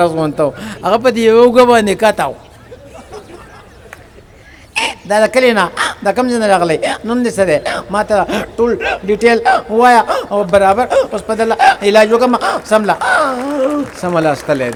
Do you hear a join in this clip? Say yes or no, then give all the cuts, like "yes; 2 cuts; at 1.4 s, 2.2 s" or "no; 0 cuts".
no; 0 cuts